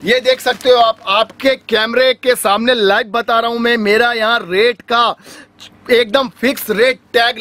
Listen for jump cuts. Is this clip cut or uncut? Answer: uncut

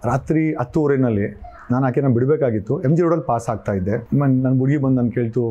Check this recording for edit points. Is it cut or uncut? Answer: cut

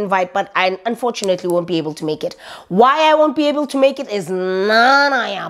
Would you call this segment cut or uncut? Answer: uncut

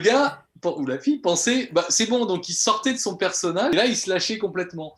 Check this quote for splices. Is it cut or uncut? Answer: cut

